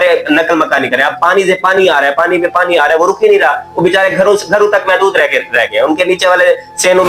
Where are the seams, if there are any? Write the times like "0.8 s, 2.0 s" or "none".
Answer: none